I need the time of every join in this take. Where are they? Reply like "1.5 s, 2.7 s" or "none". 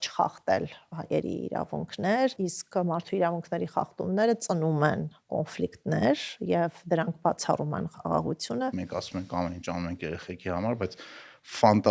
2.5 s, 8.8 s